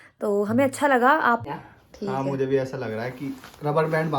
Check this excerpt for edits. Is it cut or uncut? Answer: cut